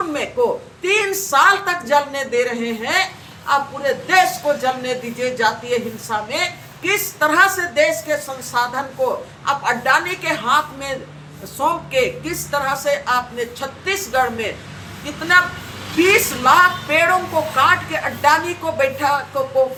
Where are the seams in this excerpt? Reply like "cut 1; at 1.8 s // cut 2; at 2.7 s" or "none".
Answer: none